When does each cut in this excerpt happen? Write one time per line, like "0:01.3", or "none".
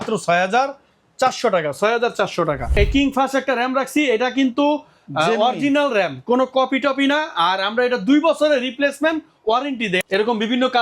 0:02.7
0:10.0